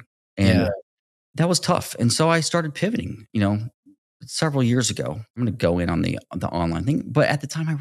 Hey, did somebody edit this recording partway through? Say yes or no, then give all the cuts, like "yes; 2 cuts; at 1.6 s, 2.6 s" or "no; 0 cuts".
yes; 1 cut; at 5.4 s